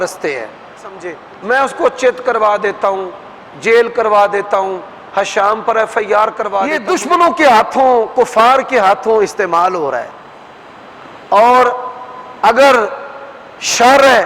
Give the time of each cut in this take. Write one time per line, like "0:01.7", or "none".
0:01.3
0:06.8